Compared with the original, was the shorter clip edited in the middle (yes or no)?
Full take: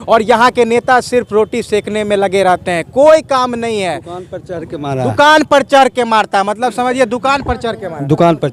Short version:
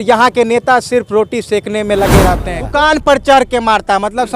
yes